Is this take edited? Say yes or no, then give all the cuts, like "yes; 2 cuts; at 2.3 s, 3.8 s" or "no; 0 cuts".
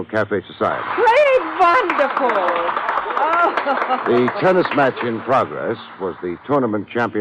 yes; 1 cut; at 5.0 s